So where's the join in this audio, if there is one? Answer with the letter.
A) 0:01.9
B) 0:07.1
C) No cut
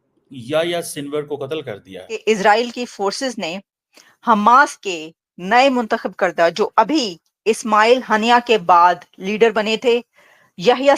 A